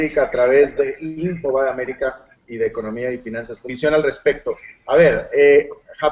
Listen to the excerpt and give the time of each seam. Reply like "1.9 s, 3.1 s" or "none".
none